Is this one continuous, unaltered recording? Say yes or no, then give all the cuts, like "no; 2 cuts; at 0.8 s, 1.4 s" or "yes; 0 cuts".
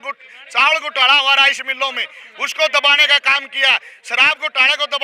yes; 0 cuts